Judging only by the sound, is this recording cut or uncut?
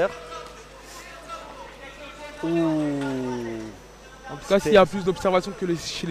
uncut